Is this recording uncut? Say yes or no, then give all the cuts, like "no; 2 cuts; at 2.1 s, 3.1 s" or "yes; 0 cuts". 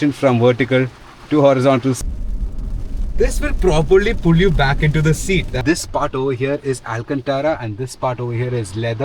no; 2 cuts; at 2.0 s, 5.6 s